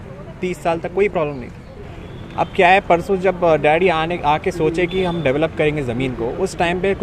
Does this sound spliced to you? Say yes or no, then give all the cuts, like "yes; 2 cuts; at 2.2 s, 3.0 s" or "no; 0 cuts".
no; 0 cuts